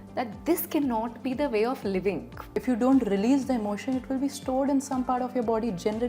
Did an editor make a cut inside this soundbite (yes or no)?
yes